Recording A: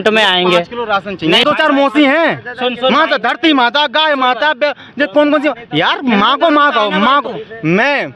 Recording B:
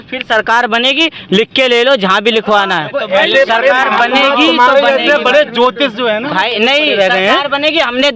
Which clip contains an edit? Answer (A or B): A